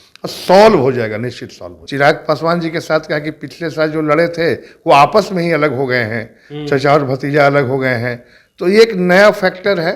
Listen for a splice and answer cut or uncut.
cut